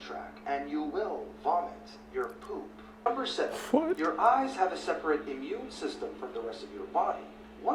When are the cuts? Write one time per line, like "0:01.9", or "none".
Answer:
0:03.1